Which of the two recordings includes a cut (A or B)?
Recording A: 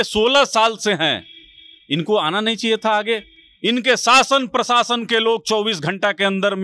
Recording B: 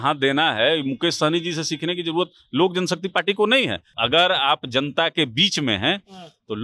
B